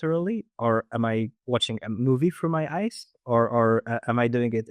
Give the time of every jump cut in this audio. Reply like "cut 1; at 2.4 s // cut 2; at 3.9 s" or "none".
none